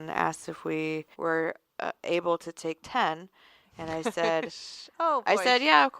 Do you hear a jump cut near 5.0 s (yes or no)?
no